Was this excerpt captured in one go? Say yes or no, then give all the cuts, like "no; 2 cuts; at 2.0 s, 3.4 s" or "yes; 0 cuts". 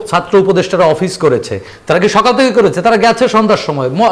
yes; 0 cuts